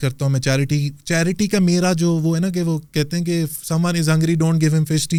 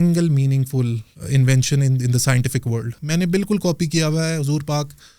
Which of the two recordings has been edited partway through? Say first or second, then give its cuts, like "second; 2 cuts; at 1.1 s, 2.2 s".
second; 2 cuts; at 1.1 s, 3.0 s